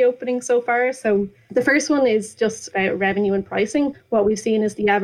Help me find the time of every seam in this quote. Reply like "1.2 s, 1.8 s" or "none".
1.4 s, 2.7 s, 4.0 s

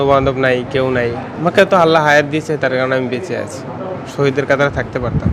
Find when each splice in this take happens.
1.4 s, 4.0 s

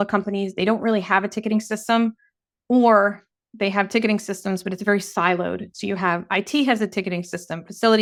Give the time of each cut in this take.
none

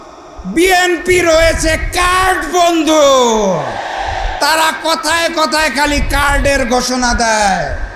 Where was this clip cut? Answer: none

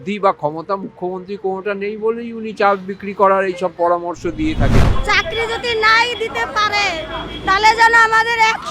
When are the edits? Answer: 4.9 s

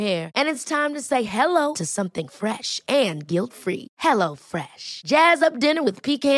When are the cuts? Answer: none

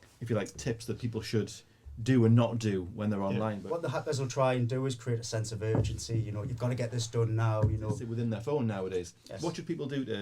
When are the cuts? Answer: 3.6 s, 8.1 s

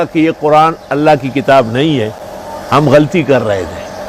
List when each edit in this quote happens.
none

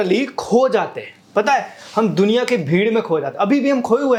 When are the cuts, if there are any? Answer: none

